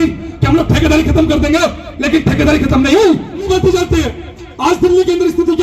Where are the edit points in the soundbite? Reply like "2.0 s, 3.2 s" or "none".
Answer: 3.5 s

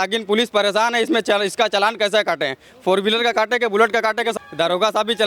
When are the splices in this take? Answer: 4.3 s

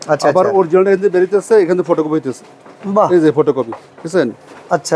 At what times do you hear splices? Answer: none

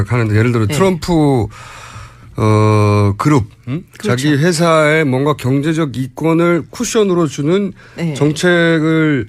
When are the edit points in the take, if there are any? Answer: none

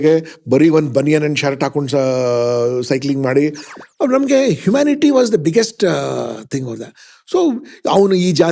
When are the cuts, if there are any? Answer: 3.7 s

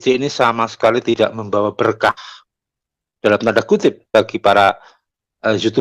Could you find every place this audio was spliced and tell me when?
none

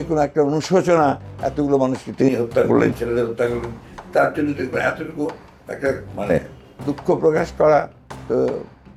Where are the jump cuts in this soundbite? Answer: none

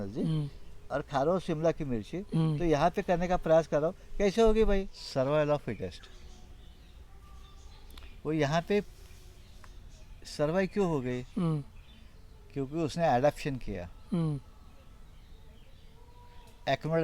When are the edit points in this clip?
5.0 s

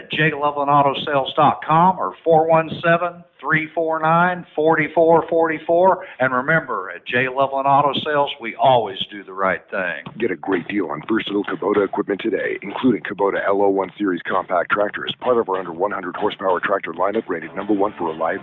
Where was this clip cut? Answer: 10.0 s, 12.5 s

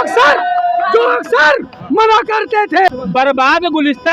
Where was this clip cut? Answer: 2.9 s

